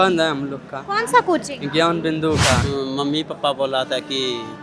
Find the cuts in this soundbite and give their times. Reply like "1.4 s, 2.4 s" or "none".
2.7 s